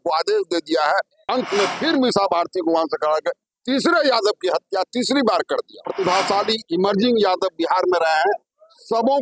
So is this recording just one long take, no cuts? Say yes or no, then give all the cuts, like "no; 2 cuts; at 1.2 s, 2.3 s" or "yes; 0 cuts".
no; 2 cuts; at 1.2 s, 5.8 s